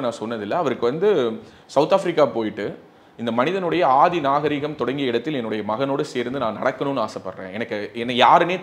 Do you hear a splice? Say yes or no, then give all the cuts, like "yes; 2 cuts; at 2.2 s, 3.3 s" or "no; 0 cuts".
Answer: no; 0 cuts